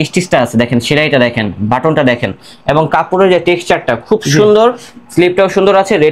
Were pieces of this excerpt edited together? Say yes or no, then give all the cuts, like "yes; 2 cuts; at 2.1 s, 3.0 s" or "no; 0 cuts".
no; 0 cuts